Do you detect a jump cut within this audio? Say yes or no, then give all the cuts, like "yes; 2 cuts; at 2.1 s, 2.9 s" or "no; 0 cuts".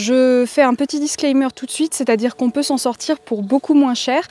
no; 0 cuts